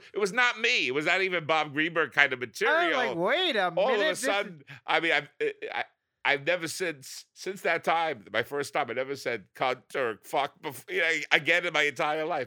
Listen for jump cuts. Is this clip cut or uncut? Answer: uncut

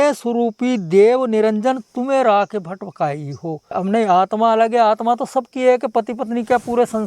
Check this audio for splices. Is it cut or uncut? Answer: cut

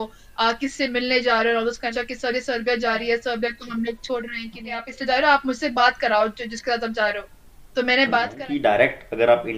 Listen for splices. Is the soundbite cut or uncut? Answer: cut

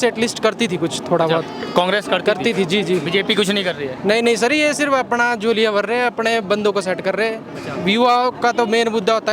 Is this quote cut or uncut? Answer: uncut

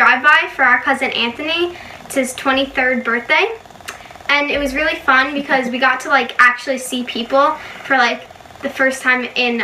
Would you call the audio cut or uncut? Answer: uncut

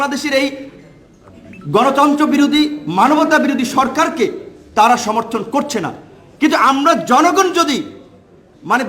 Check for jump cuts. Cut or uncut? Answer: uncut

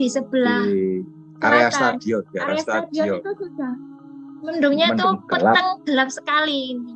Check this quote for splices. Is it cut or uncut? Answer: uncut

